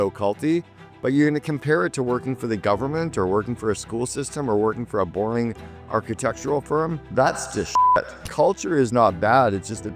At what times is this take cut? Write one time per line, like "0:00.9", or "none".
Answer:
0:07.0
0:08.2